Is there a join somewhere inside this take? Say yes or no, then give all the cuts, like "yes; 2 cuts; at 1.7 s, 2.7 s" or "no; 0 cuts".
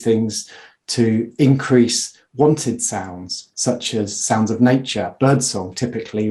no; 0 cuts